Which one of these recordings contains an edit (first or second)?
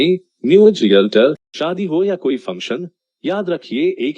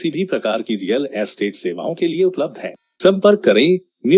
first